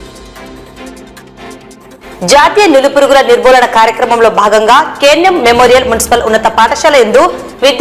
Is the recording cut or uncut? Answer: cut